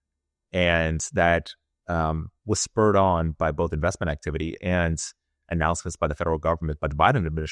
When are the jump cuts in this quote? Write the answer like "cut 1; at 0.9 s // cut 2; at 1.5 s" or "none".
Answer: none